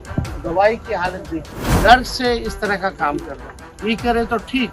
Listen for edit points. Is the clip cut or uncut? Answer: cut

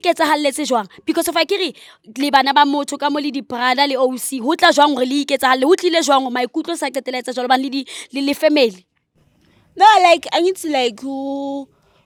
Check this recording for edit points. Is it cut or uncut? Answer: uncut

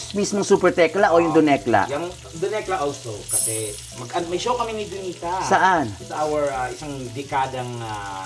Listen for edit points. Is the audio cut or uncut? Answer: uncut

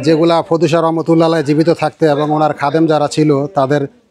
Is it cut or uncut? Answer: uncut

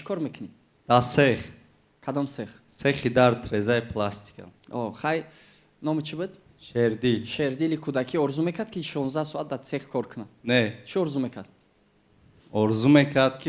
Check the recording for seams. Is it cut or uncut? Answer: uncut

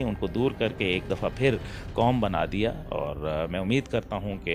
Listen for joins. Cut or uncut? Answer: uncut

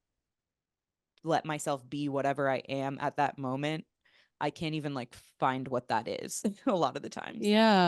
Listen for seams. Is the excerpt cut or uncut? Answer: uncut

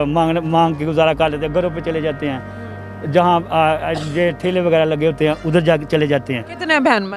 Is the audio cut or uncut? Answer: uncut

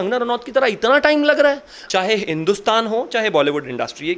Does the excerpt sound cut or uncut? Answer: cut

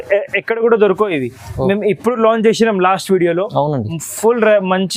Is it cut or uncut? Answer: uncut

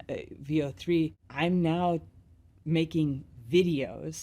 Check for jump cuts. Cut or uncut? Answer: cut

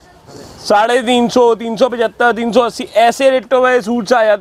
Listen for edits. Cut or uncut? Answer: uncut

